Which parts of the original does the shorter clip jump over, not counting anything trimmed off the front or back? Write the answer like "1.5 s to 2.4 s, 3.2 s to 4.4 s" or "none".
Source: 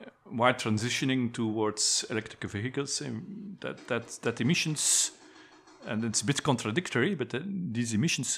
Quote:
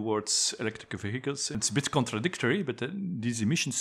3.1 s to 6.1 s